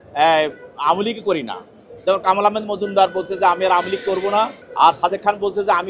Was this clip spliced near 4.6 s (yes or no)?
yes